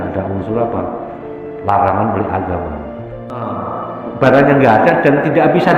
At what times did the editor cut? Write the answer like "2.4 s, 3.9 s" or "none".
3.5 s